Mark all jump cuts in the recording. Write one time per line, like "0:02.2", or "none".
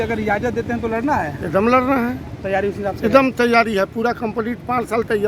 none